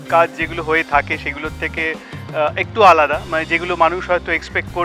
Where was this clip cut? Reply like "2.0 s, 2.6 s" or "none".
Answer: none